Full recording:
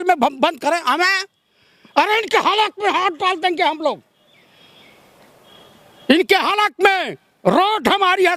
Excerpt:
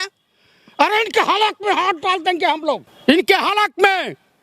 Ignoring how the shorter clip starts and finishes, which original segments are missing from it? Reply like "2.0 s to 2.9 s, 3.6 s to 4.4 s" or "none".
4.1 s to 5.9 s